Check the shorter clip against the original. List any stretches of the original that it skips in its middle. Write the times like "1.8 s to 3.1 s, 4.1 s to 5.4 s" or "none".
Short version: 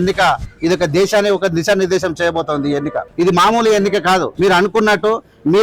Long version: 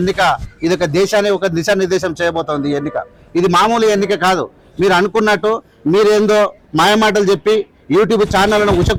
3.0 s to 3.2 s, 4.5 s to 4.7 s